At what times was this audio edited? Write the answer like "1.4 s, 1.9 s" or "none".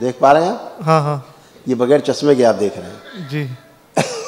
none